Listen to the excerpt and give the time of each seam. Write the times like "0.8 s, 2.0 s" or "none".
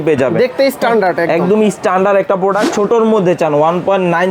2.6 s